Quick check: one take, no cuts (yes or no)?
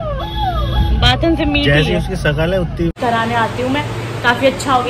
no